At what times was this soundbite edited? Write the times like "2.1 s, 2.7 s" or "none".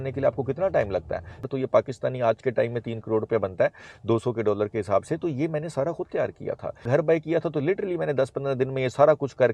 1.5 s, 6.9 s